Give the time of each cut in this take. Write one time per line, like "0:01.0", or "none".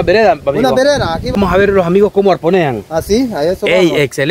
0:01.4